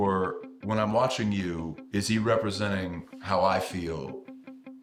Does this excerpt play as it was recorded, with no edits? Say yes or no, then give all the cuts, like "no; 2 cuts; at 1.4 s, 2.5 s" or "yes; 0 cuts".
yes; 0 cuts